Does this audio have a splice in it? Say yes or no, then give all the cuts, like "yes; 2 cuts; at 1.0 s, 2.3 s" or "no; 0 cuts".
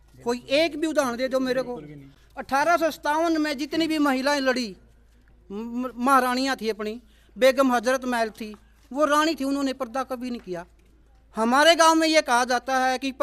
no; 0 cuts